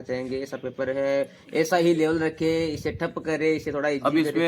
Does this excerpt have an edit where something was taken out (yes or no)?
no